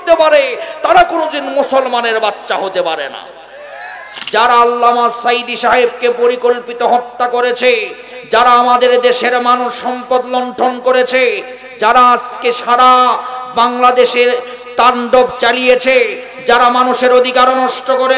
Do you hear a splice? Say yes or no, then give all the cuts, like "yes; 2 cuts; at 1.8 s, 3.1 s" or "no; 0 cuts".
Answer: yes; 1 cut; at 4.1 s